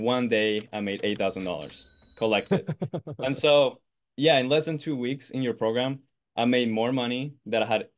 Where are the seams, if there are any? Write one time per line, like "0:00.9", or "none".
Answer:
none